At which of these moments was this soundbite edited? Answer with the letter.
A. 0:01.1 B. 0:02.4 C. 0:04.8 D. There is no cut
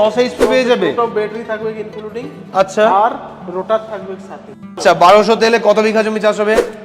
C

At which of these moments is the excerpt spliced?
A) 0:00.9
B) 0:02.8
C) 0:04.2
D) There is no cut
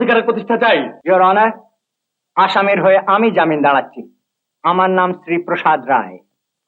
A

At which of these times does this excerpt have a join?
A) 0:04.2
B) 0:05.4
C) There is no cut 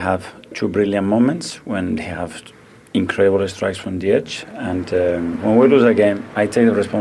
B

